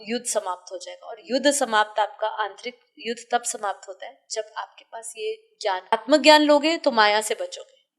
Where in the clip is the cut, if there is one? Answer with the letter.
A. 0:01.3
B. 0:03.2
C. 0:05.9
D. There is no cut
C